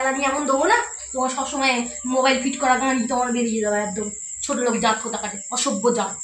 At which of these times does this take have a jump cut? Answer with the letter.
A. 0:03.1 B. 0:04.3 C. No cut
B